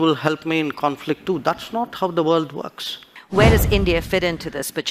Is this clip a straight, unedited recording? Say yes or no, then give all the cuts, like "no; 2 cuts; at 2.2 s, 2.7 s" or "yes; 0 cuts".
no; 1 cut; at 3.1 s